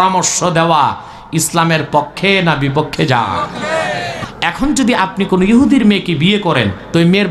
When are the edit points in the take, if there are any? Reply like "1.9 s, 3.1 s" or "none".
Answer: 4.2 s